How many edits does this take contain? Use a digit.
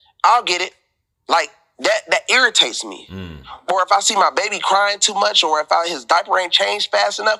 0